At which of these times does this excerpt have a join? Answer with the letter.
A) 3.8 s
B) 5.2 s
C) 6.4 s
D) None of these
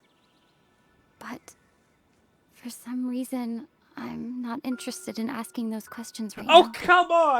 C